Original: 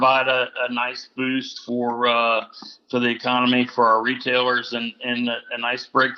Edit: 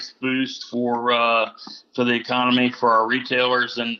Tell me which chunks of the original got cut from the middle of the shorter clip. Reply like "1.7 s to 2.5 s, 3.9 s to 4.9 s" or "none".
none